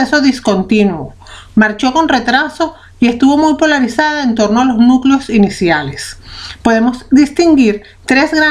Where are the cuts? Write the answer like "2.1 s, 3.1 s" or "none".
1.0 s